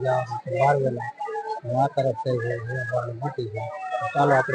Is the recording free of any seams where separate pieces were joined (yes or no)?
yes